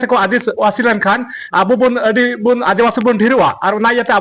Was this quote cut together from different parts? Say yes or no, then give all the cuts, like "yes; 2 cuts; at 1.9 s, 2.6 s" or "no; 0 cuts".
no; 0 cuts